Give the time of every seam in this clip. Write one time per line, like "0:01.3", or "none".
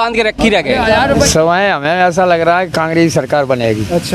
0:01.3